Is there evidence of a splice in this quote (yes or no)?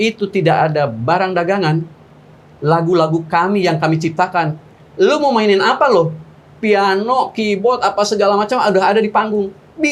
no